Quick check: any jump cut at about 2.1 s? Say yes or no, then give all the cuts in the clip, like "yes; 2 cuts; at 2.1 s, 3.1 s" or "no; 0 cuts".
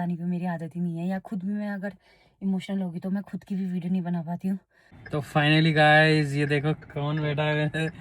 no; 1 cut; at 4.9 s